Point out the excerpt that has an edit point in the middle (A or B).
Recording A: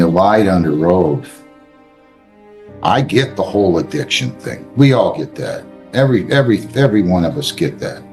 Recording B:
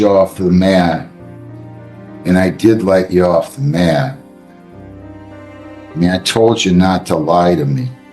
B